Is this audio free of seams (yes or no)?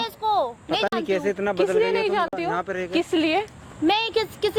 yes